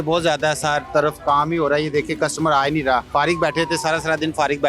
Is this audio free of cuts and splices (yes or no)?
no